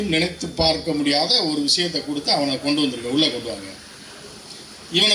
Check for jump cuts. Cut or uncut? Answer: uncut